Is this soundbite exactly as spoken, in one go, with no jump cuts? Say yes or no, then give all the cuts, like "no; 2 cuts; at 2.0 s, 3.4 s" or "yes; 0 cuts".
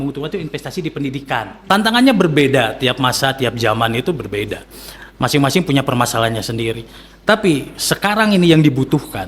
no; 1 cut; at 1.6 s